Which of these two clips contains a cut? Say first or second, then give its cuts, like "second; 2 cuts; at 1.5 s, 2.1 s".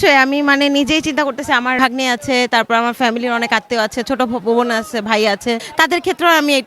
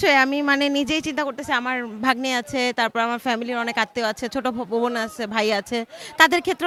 first; 2 cuts; at 1.8 s, 5.7 s